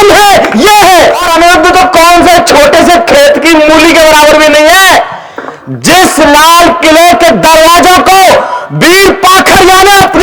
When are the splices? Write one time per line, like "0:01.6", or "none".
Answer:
0:01.2